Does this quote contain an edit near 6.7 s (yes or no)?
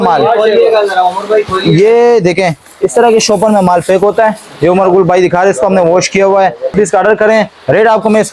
yes